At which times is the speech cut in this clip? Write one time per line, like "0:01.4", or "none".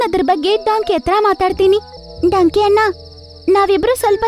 0:02.0